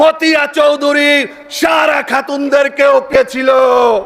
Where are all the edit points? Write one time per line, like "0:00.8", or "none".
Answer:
0:03.2